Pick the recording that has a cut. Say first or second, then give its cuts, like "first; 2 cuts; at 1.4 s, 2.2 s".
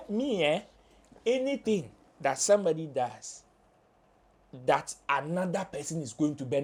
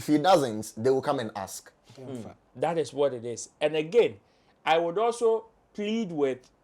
second; 1 cut; at 2.4 s